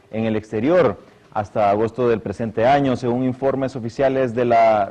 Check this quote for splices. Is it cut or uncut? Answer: cut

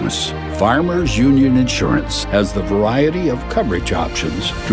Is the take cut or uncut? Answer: uncut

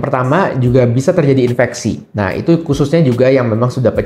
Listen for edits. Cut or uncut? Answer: uncut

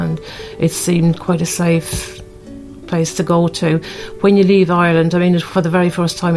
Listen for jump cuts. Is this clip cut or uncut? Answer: uncut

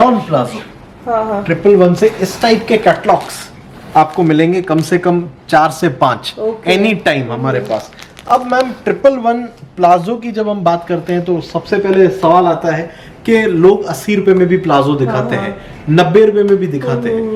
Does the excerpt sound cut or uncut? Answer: uncut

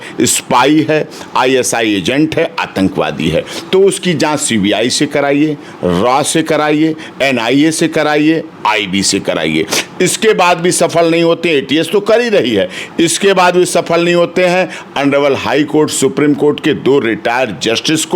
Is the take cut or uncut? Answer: uncut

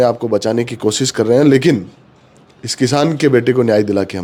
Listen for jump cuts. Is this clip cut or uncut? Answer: uncut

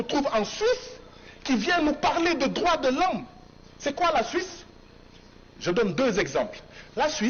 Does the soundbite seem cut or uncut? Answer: uncut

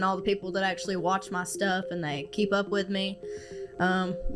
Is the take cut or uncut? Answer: cut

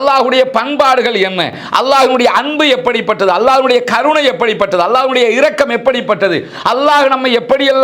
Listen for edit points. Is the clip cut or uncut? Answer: uncut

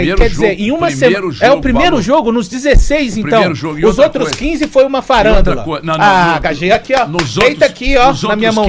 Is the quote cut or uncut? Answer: uncut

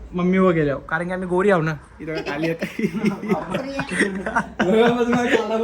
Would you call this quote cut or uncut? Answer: uncut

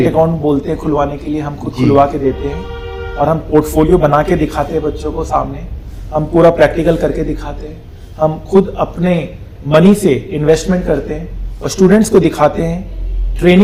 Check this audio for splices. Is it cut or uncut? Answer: uncut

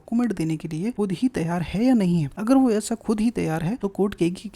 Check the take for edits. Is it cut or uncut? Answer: cut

